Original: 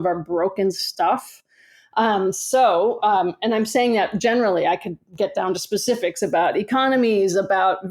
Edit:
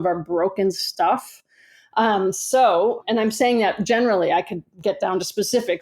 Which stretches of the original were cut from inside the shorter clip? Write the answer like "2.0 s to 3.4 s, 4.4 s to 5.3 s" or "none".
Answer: 3.0 s to 3.3 s

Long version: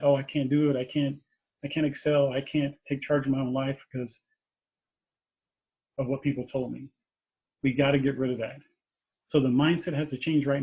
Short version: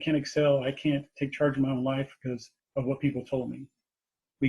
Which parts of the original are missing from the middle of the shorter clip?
4.2 s to 5.8 s

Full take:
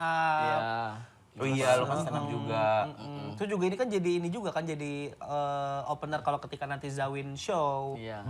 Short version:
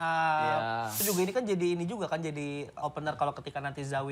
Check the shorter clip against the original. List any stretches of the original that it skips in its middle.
1.0 s to 3.4 s, 5.2 s to 5.8 s

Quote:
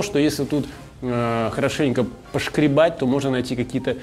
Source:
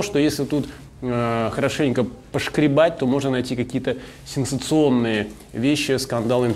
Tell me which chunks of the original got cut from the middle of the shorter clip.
none

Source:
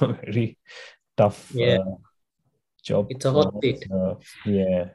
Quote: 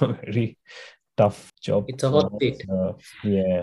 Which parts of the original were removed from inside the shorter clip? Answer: 1.4 s to 2.7 s

